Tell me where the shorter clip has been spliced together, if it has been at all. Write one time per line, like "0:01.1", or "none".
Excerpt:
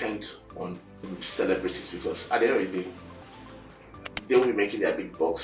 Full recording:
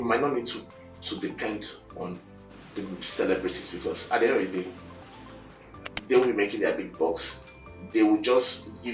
0:01.1

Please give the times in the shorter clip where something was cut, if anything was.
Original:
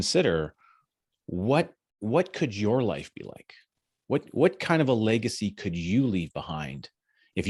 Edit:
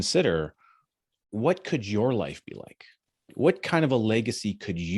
0:01.2
0:03.3

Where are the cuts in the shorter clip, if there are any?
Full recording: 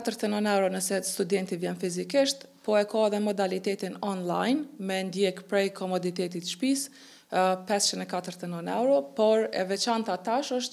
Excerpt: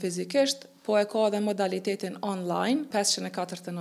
0:02.9

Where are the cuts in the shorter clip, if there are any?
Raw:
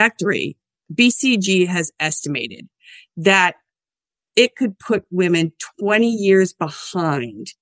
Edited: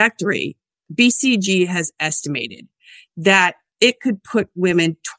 0:03.6

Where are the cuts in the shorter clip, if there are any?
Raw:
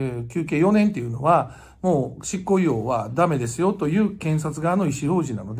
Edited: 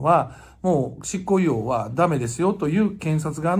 none

